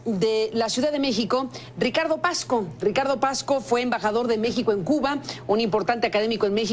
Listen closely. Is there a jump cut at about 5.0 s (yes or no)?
yes